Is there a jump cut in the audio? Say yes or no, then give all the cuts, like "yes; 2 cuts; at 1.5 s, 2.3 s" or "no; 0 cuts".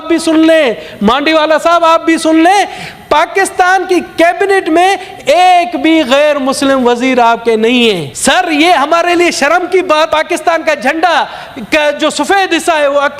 yes; 2 cuts; at 8.1 s, 10.1 s